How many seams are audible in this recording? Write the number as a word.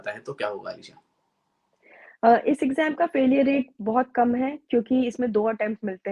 zero